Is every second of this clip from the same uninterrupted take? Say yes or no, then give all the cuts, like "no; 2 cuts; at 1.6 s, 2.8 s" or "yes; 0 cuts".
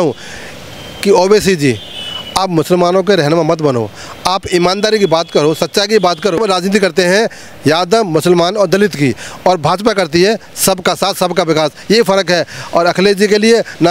no; 1 cut; at 6.4 s